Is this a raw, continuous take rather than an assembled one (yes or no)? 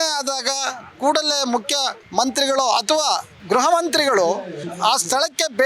no